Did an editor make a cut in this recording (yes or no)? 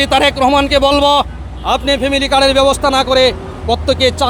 no